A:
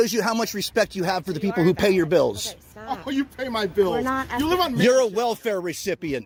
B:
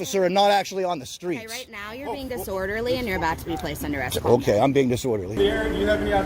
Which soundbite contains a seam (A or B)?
B